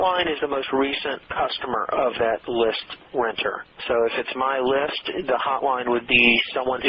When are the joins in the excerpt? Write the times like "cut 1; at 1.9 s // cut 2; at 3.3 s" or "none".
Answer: none